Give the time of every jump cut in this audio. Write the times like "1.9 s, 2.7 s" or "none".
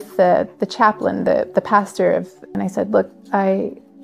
2.6 s